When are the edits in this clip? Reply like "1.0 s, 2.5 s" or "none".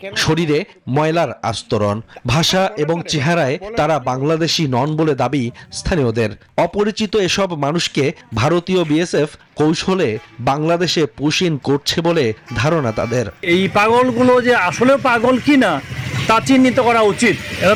13.4 s